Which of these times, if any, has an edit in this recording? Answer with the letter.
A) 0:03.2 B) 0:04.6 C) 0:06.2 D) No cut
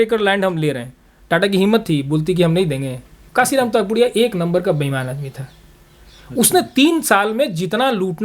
A